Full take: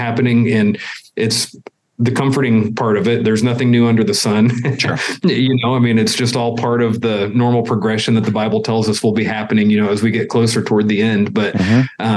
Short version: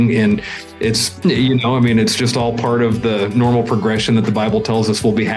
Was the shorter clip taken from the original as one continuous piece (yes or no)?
no